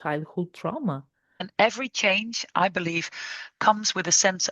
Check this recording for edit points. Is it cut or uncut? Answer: cut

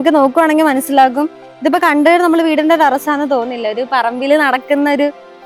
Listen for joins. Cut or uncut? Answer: uncut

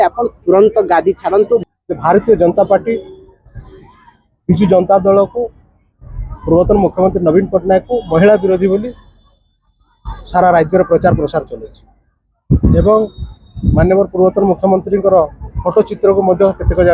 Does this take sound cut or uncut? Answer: cut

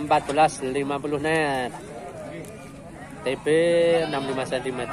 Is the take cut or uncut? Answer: uncut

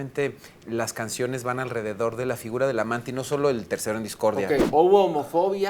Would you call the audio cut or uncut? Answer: cut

